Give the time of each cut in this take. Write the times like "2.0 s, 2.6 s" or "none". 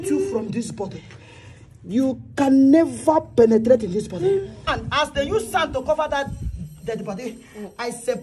4.8 s